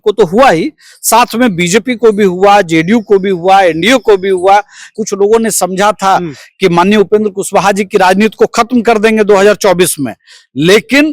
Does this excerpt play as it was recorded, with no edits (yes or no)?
no